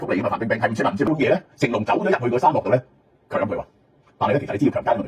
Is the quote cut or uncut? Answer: cut